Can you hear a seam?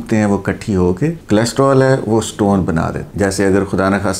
yes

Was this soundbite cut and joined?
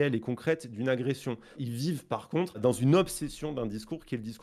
yes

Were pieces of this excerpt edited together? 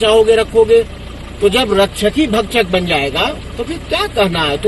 no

